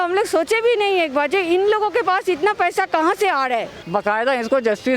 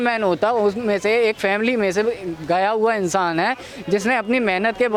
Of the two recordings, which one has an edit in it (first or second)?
first